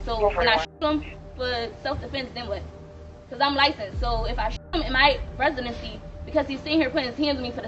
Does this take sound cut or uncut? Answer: uncut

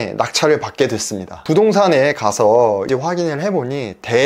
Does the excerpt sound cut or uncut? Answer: cut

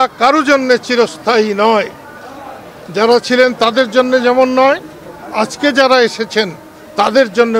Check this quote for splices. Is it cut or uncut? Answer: uncut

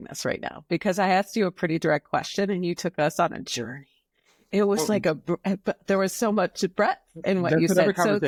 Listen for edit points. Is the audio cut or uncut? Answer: uncut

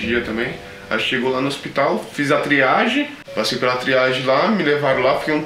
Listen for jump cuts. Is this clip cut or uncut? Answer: uncut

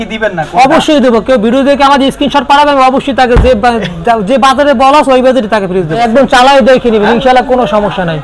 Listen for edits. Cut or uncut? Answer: cut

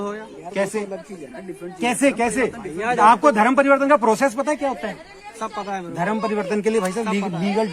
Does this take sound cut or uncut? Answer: uncut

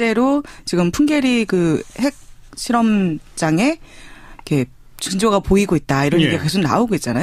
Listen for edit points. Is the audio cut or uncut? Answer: cut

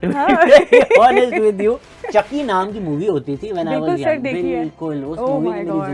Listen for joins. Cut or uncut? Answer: cut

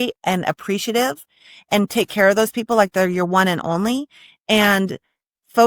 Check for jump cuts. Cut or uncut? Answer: uncut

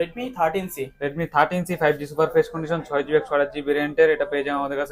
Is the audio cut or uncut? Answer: uncut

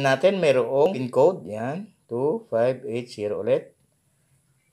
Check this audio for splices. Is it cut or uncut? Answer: cut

